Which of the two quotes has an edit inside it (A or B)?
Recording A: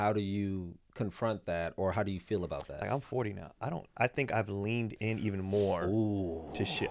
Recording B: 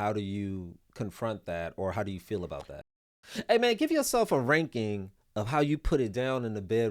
B